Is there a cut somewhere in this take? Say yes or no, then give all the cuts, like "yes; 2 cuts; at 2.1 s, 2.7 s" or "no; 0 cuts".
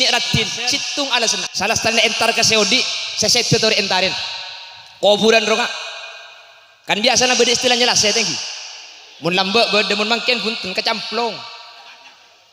yes; 1 cut; at 1.4 s